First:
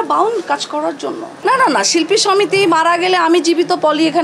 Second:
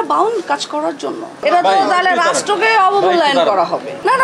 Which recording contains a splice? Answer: first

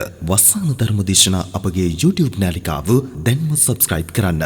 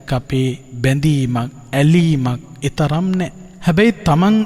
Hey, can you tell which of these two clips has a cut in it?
second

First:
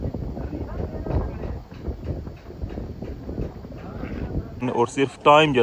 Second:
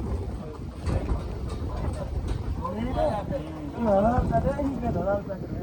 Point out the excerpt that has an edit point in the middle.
first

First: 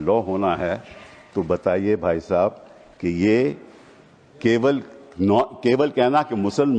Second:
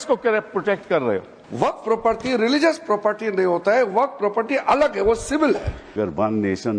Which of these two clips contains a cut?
second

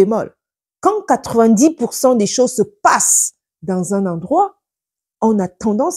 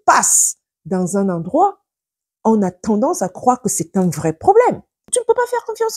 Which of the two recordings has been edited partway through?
second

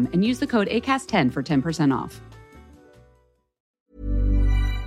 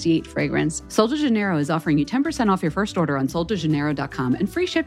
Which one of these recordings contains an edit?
first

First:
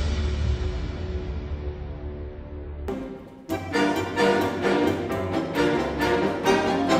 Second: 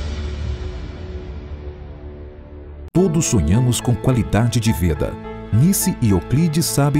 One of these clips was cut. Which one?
second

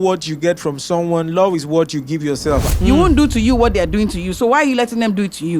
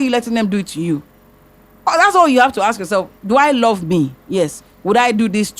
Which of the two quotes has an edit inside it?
first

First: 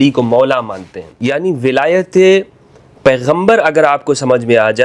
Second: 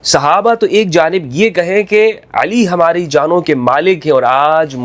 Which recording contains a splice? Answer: first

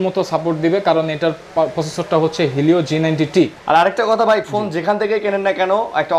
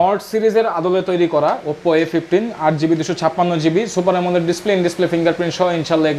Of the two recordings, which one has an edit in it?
first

